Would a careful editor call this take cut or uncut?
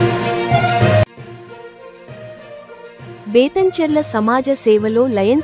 cut